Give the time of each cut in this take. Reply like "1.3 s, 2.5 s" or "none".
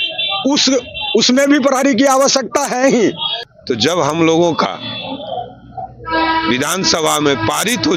3.3 s